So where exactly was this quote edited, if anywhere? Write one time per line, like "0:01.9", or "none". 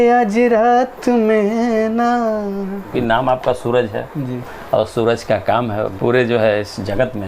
0:02.9
0:05.9